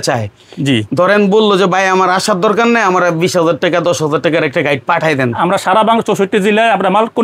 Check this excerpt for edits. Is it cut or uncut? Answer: uncut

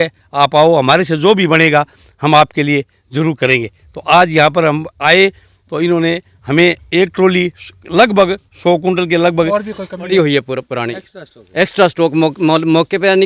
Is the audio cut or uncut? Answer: cut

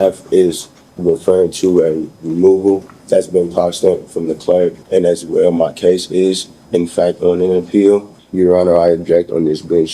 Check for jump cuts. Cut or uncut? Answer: cut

